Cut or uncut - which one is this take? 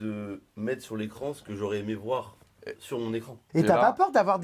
uncut